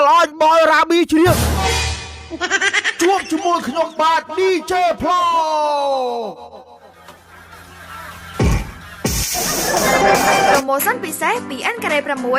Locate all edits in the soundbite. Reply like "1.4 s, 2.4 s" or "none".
10.6 s